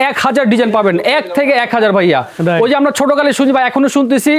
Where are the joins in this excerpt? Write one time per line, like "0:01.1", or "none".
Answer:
none